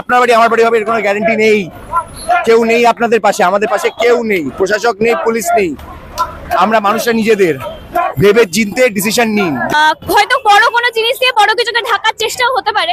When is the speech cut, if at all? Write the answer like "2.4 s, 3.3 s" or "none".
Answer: 9.7 s